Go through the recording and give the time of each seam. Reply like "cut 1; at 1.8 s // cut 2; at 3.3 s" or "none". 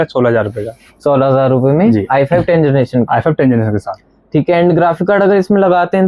none